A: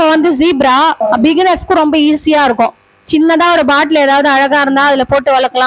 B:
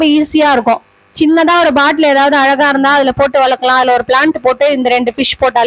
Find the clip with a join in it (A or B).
A